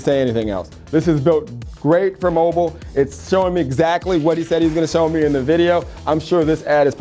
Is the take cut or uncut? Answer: uncut